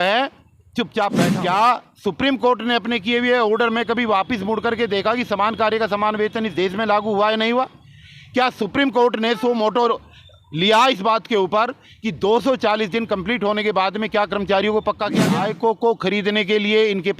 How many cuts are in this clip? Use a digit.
2